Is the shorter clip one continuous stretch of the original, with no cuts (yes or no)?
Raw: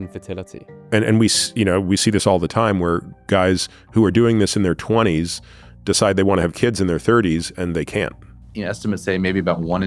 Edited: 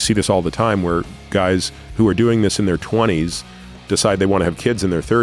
yes